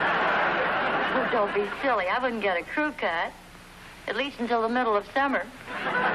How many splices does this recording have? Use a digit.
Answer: 1